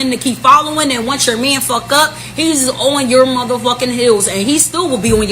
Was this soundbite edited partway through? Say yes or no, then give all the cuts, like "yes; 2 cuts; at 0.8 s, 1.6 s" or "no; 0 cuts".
yes; 1 cut; at 1.6 s